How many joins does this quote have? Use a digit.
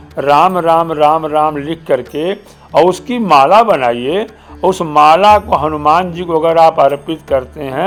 0